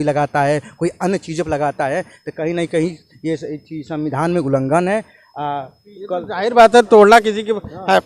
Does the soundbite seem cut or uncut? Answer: uncut